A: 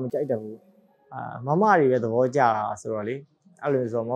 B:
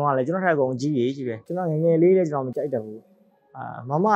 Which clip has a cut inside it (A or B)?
B